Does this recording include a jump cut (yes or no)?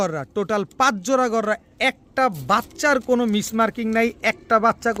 no